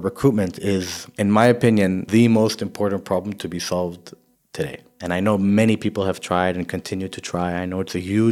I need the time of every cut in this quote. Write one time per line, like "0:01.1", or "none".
0:01.0
0:02.0
0:04.5